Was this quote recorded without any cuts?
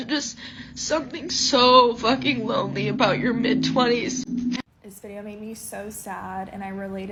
yes; 0 cuts

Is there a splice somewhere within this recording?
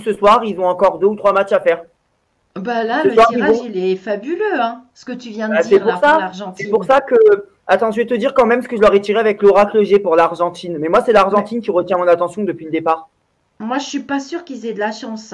no; 0 cuts

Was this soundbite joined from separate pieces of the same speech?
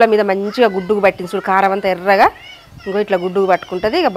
no; 0 cuts

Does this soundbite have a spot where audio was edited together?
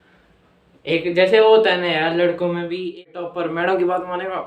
yes; 1 cut; at 3.0 s

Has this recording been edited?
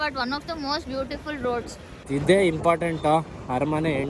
yes; 1 cut; at 2.0 s

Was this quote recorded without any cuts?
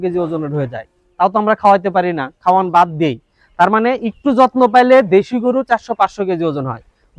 yes; 0 cuts

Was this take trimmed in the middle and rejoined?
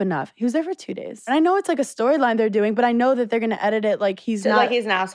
yes; 1 cut; at 1.3 s

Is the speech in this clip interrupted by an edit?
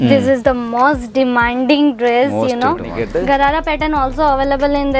yes; 1 cut; at 2.9 s

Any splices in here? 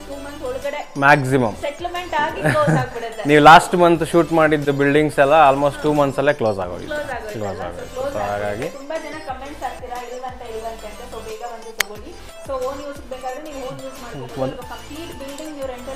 no; 0 cuts

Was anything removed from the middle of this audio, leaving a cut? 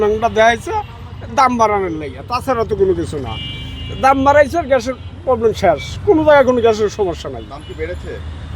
no; 0 cuts

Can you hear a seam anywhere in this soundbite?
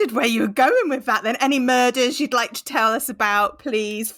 no; 0 cuts

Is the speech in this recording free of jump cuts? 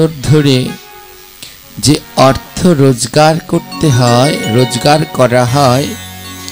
yes; 0 cuts

